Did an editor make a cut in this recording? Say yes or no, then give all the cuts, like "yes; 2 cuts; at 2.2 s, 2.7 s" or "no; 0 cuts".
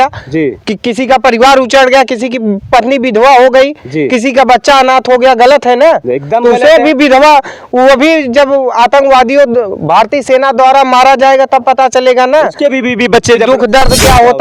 no; 0 cuts